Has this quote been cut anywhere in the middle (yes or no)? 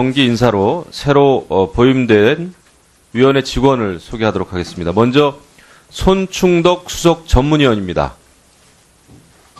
yes